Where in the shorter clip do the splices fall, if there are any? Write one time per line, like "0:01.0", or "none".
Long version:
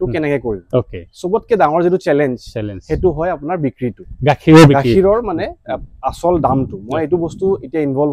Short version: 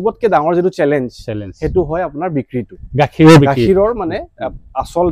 none